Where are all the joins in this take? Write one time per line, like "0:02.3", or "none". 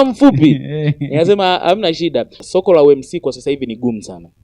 0:02.4